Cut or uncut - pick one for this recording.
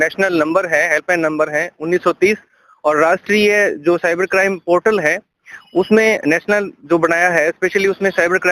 uncut